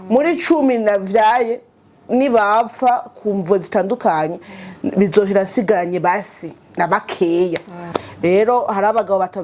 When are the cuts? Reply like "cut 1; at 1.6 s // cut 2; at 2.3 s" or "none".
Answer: cut 1; at 8.0 s